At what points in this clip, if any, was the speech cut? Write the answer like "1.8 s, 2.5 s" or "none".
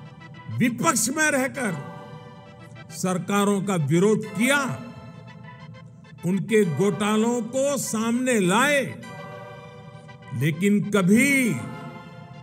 none